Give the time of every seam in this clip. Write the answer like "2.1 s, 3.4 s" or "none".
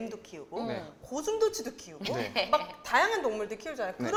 none